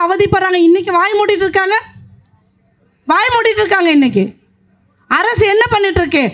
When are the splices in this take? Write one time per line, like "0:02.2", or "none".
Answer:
none

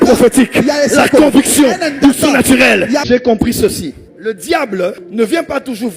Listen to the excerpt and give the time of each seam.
0:03.0

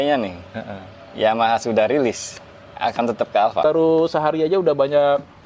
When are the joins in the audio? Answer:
0:03.6

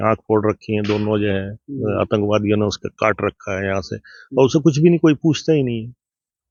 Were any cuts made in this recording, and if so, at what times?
none

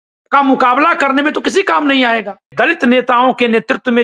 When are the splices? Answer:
0:02.5

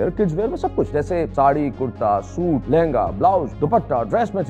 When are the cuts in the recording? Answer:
0:01.0
0:02.6
0:03.5

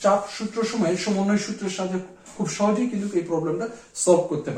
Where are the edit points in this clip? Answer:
none

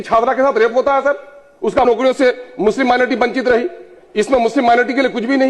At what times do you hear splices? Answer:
0:01.9

